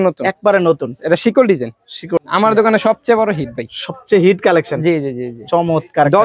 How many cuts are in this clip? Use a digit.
1